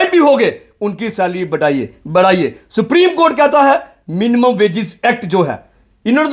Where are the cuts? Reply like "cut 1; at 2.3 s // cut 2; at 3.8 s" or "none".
none